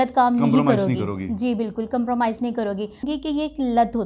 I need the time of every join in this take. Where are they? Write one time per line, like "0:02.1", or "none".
0:03.1